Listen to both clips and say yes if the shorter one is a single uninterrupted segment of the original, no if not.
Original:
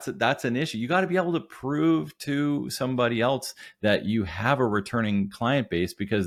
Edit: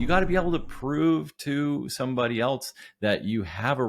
yes